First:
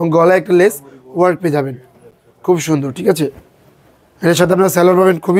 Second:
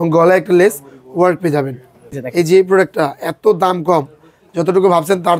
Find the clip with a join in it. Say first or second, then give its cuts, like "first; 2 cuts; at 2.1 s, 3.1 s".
second; 1 cut; at 2.2 s